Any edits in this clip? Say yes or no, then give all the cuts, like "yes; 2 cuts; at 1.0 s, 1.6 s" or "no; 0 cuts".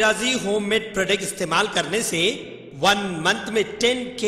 no; 0 cuts